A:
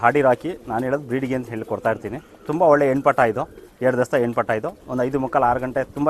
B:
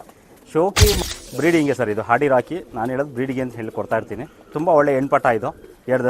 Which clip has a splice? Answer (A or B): B